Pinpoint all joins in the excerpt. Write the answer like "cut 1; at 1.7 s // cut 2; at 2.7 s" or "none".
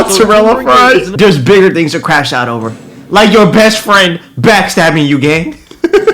cut 1; at 1.1 s